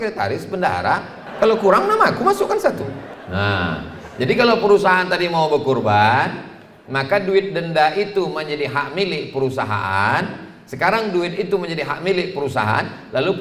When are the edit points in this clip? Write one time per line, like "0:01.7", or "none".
0:01.2
0:03.1